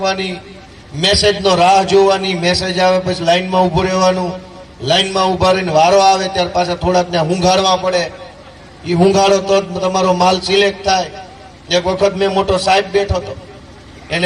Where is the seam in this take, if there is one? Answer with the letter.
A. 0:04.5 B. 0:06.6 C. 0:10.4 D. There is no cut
D